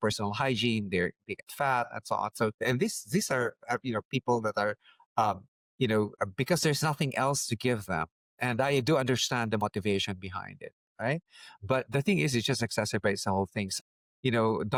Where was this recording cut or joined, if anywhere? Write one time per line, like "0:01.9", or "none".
none